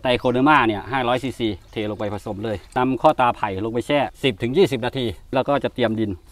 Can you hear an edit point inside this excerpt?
yes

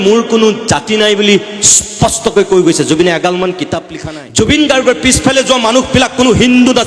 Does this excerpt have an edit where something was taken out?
yes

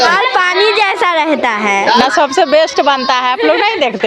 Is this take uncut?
no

